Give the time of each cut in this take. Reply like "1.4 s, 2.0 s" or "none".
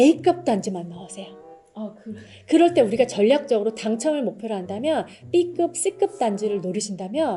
none